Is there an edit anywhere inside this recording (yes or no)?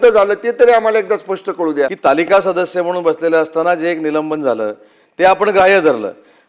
yes